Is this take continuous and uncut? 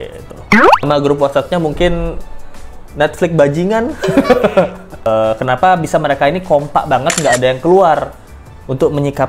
no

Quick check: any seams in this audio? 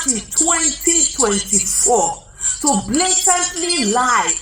no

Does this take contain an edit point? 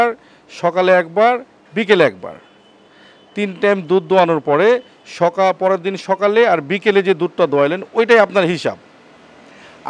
no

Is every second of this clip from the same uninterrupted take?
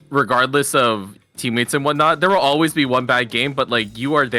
no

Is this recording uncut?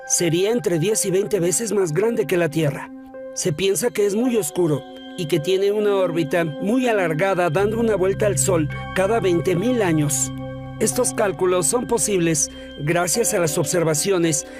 no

